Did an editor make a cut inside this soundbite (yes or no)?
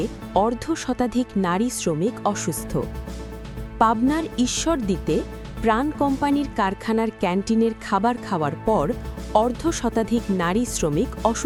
no